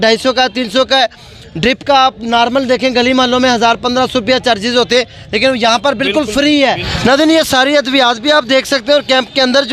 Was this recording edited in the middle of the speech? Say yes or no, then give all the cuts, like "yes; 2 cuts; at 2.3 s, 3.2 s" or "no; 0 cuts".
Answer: yes; 1 cut; at 6.9 s